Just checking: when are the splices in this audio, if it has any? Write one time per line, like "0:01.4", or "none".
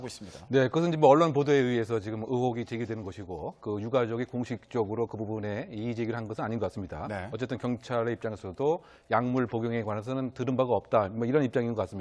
0:09.0